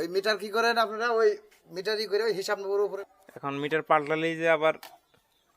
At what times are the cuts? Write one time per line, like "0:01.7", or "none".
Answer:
0:02.9